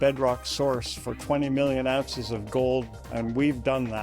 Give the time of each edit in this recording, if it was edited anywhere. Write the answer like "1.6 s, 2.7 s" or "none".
3.0 s